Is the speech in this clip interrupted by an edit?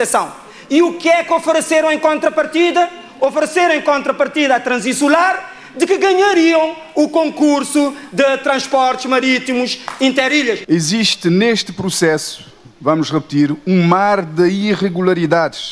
yes; 1 cut; at 10.6 s

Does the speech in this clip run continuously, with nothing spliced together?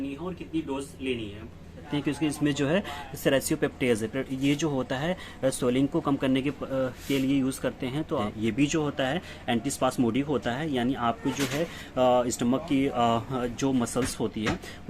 no; 2 cuts; at 1.9 s, 8.2 s

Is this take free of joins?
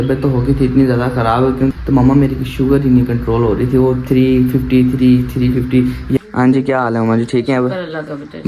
no; 2 cuts; at 1.7 s, 6.2 s

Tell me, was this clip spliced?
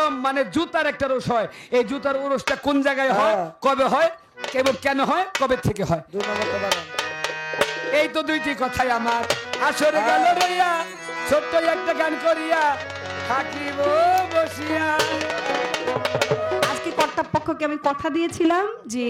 no; 0 cuts

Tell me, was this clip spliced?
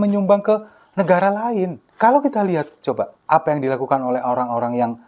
yes; 2 cuts; at 1.8 s, 3.2 s

